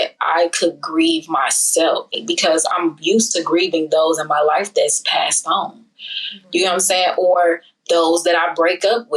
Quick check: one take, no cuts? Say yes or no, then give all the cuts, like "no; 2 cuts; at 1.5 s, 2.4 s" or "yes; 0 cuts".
no; 1 cut; at 2.2 s